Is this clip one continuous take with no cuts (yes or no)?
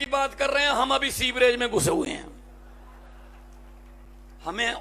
yes